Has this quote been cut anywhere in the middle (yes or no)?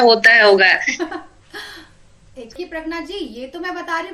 no